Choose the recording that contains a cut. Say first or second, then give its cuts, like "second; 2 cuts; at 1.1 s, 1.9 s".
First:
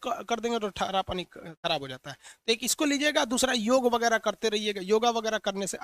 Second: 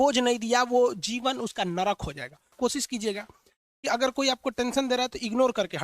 second; 1 cut; at 2.5 s